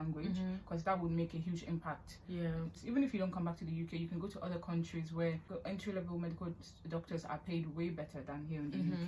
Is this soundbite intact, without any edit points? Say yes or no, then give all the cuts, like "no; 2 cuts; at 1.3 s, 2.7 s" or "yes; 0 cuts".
no; 2 cuts; at 2.8 s, 5.5 s